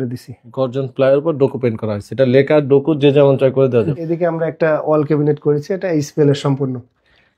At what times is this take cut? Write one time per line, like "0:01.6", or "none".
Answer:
0:03.9

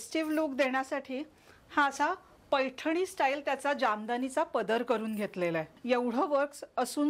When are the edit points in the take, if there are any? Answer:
0:05.7

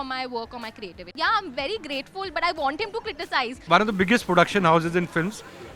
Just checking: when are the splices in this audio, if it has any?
0:01.1
0:03.6

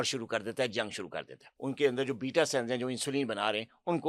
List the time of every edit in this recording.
0:01.5

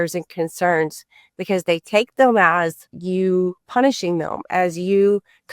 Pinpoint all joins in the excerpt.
0:02.9
0:03.6

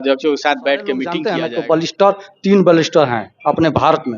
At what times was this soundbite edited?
0:01.2

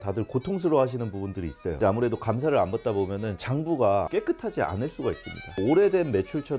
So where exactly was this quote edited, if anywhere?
0:04.1
0:05.6

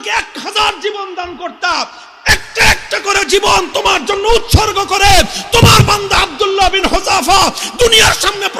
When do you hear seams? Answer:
none

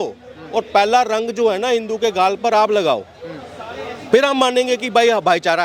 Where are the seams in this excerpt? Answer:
none

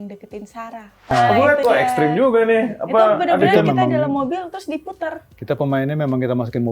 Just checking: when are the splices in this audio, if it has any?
0:01.1

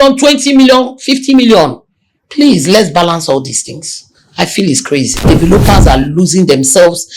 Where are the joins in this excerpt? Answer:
0:05.2

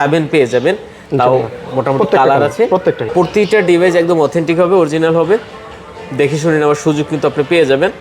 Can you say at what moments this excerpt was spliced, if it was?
0:03.0

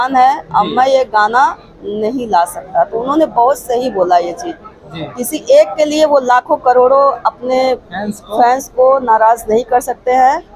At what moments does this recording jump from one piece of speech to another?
none

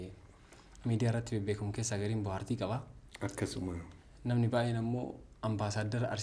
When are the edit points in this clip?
none

